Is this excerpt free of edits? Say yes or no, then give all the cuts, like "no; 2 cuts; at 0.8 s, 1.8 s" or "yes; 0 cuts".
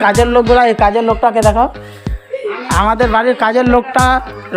yes; 0 cuts